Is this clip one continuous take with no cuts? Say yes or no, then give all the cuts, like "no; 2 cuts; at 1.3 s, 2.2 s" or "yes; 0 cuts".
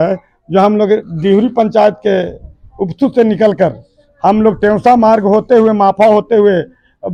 yes; 0 cuts